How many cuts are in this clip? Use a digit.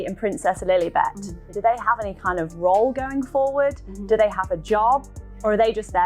0